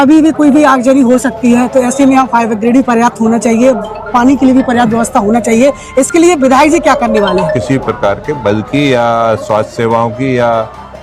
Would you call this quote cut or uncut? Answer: cut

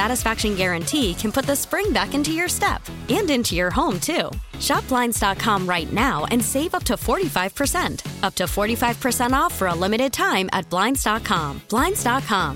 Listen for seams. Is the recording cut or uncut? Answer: uncut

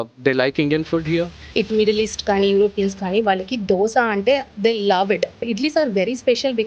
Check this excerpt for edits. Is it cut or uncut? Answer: cut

